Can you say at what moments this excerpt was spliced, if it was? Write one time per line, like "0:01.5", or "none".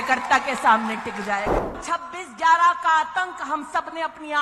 0:01.8